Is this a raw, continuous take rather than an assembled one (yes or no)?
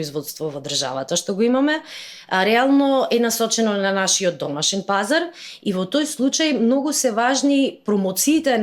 yes